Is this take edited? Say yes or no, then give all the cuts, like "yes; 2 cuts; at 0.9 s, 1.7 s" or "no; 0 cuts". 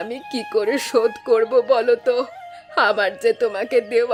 no; 0 cuts